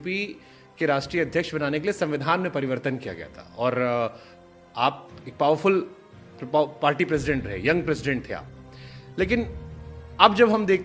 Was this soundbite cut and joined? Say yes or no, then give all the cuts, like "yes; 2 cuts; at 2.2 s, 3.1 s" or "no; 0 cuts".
no; 0 cuts